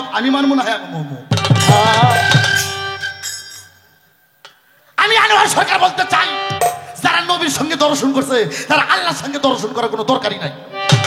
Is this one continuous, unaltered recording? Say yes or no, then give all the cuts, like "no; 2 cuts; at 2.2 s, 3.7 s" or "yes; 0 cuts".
yes; 0 cuts